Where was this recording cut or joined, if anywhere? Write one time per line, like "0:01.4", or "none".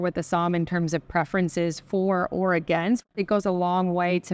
0:03.1